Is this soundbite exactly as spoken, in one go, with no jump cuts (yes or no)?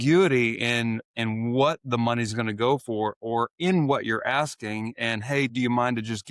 yes